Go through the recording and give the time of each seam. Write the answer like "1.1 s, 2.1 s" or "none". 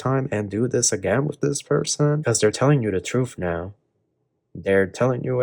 2.2 s